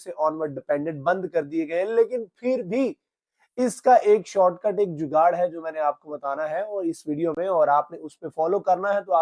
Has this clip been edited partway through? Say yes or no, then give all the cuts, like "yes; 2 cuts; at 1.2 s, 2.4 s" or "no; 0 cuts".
no; 0 cuts